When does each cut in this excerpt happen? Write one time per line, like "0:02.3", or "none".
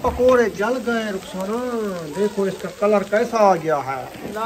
none